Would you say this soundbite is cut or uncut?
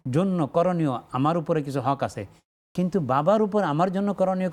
uncut